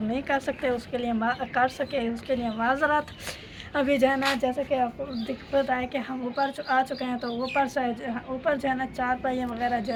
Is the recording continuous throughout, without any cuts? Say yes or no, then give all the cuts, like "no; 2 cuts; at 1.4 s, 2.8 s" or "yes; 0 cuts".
yes; 0 cuts